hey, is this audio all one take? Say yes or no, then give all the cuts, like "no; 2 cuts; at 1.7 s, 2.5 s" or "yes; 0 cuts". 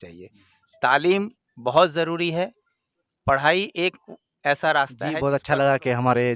no; 1 cut; at 5.3 s